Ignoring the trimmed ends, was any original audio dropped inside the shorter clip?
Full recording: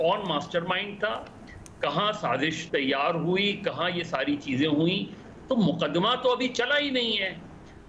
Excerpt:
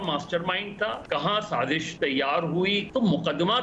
yes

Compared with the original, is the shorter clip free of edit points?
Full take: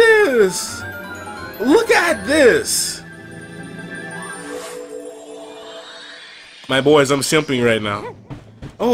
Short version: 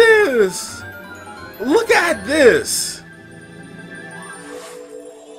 yes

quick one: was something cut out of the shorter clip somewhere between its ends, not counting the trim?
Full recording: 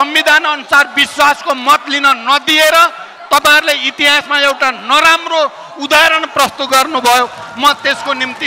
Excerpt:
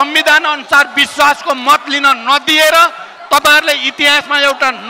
no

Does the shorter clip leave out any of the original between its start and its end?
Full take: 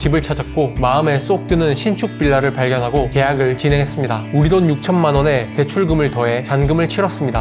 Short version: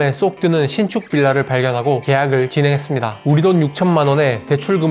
no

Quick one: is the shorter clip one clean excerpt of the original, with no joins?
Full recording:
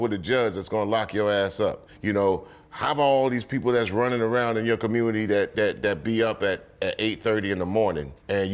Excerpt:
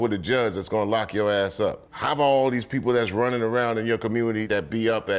no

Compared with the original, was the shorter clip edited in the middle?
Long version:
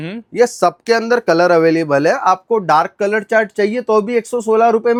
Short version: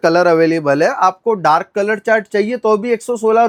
no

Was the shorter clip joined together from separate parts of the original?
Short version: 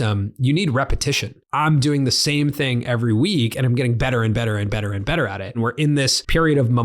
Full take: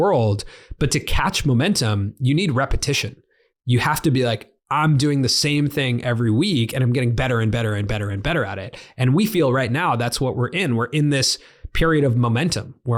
yes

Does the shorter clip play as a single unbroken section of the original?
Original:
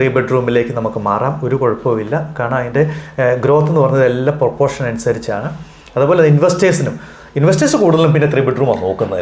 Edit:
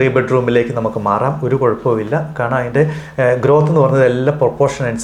yes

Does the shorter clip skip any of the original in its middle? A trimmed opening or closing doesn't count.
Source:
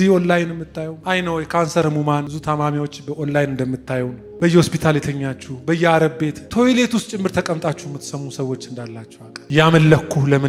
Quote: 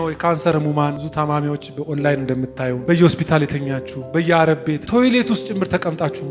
yes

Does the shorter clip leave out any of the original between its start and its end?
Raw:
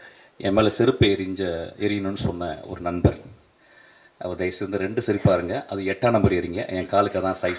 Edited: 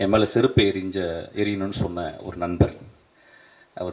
no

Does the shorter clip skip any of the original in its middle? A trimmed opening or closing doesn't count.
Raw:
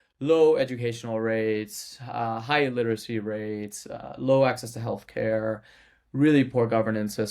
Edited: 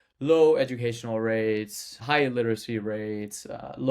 yes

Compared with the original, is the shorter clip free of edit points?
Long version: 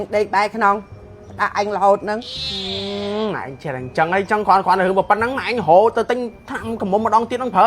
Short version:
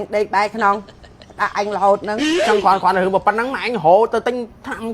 no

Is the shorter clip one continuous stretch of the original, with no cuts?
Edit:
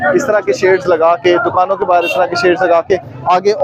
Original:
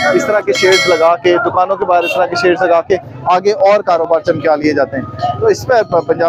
yes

